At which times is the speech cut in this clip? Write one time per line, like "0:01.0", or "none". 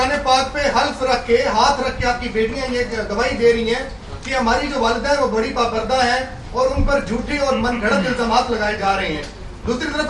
none